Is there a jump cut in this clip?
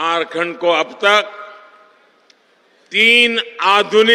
no; 0 cuts

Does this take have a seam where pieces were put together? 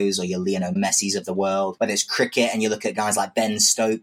yes; 2 cuts; at 0.8 s, 1.7 s

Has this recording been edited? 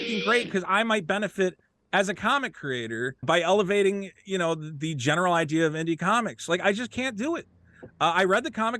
yes; 1 cut; at 3.2 s

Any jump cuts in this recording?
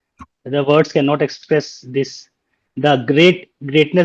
yes; 1 cut; at 1.4 s

